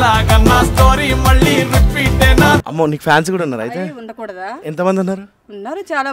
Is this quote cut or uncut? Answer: cut